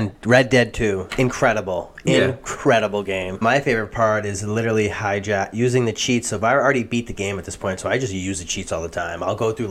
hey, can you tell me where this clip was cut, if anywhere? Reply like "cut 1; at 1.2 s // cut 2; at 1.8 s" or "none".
cut 1; at 3.4 s